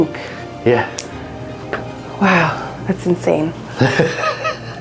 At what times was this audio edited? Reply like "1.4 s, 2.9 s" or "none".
none